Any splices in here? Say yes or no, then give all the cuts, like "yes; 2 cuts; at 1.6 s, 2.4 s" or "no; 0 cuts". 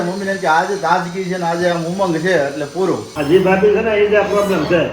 yes; 1 cut; at 3.1 s